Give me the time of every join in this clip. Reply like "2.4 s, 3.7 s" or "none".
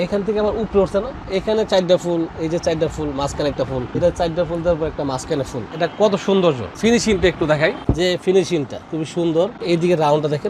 1.2 s, 3.9 s, 5.6 s, 6.7 s, 7.8 s, 8.8 s, 9.6 s